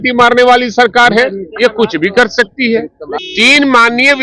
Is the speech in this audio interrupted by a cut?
yes; 1 cut; at 3.0 s

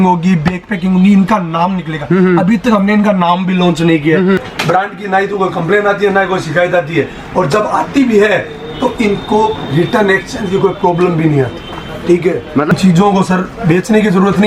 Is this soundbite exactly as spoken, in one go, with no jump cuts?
no; 2 cuts; at 4.4 s, 12.7 s

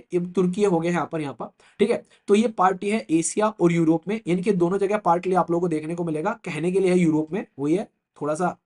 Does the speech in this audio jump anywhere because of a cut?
no; 0 cuts

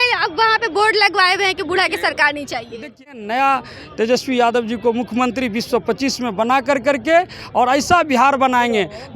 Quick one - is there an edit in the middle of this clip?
yes; 1 cut; at 3.0 s

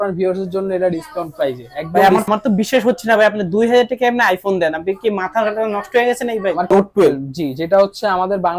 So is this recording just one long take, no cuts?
no; 2 cuts; at 2.2 s, 6.7 s

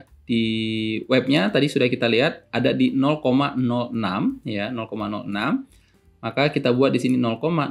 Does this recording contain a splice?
no; 0 cuts

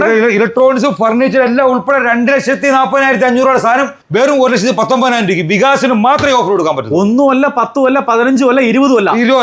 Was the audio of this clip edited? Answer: no; 0 cuts

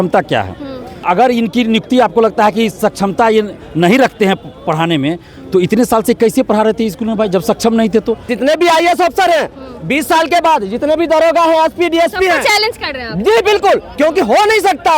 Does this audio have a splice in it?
yes; 2 cuts; at 1.0 s, 8.3 s

